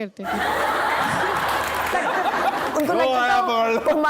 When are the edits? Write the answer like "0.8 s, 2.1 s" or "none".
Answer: 1.9 s